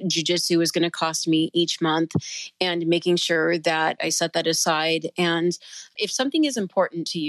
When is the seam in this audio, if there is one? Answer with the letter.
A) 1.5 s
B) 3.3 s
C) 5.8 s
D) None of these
C